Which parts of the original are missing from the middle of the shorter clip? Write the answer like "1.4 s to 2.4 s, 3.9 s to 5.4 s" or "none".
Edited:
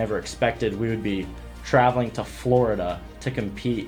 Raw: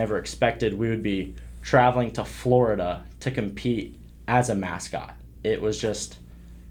none